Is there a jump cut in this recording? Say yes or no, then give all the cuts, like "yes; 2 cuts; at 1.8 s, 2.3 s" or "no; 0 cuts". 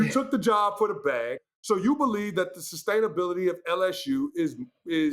yes; 1 cut; at 1.5 s